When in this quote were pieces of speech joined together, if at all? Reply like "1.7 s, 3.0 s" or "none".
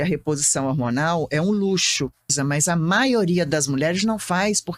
2.4 s